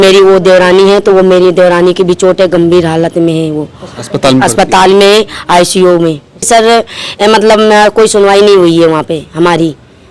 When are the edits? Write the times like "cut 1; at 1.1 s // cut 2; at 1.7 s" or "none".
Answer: cut 1; at 6.5 s